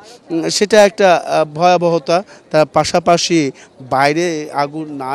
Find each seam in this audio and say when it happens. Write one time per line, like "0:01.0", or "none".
none